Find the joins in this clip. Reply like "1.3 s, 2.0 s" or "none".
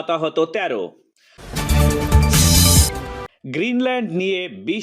1.4 s, 3.3 s